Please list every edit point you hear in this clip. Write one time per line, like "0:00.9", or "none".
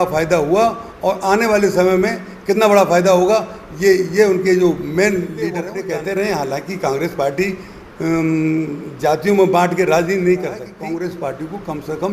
0:05.6
0:10.7